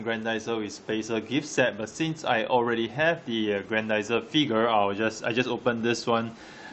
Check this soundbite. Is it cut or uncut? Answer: cut